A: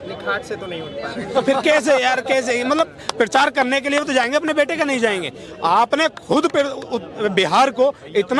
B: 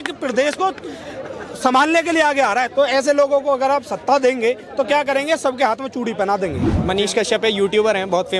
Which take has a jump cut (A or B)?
B